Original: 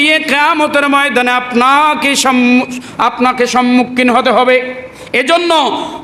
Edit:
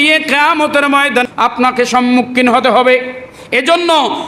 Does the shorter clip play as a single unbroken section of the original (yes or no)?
no